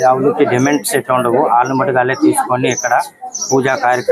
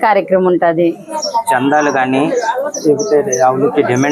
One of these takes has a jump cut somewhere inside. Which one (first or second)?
second